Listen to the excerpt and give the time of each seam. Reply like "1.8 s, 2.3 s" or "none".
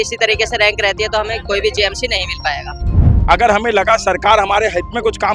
2.8 s